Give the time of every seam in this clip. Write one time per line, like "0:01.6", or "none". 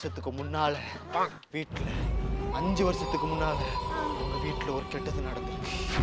none